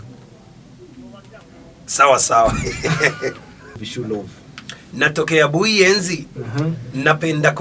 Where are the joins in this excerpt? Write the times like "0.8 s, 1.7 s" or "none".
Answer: 3.9 s